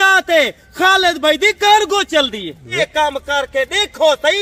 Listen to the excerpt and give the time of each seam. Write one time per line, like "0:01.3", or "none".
0:02.6